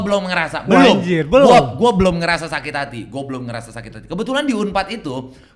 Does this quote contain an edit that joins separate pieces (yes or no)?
no